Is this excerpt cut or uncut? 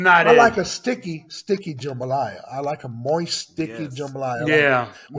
uncut